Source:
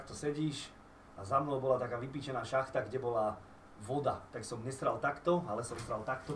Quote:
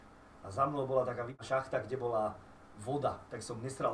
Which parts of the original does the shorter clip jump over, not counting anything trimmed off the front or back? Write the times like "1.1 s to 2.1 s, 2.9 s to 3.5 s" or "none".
2.1 s to 2.4 s